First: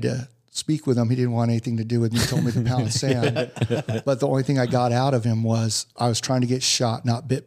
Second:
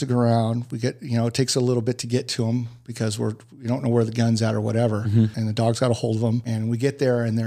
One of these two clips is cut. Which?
second; 2 cuts; at 5.4 s, 6.5 s

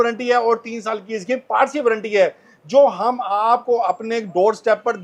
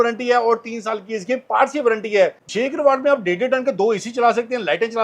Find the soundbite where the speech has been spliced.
second; 1 cut; at 2.4 s

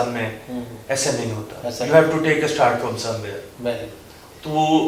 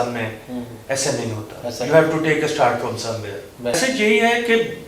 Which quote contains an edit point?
second; 1 cut; at 3.7 s

